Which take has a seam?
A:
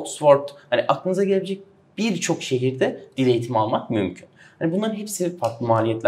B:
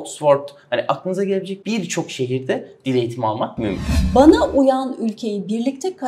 B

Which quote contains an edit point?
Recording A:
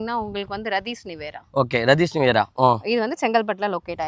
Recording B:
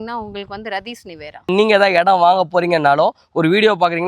B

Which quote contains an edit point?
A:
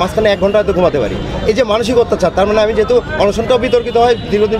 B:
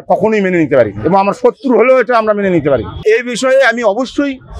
B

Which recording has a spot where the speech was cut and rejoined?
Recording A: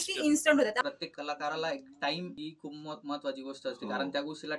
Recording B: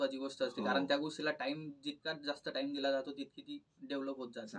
A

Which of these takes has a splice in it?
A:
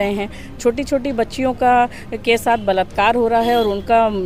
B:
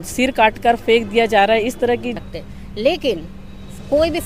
B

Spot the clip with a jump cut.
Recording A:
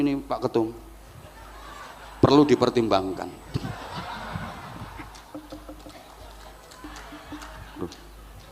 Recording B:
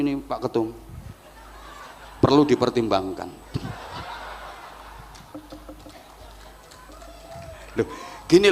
A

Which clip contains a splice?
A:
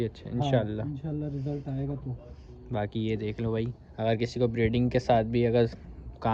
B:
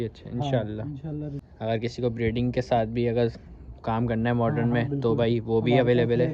B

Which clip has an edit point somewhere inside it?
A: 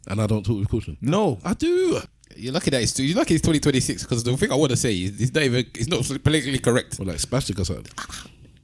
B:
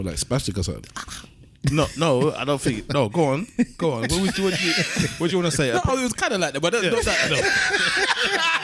A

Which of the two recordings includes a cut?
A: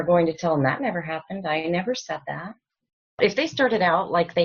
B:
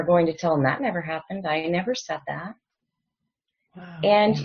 A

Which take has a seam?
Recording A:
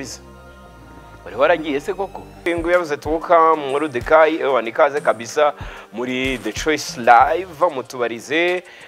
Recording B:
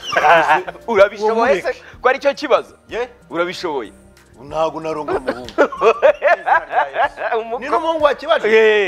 A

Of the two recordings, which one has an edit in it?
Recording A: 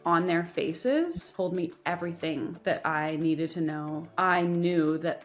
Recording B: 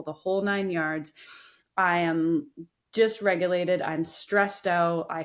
A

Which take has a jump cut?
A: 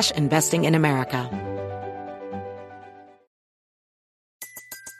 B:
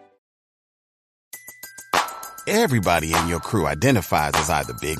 A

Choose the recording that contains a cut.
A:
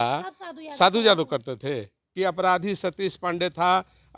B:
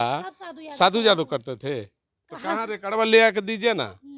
A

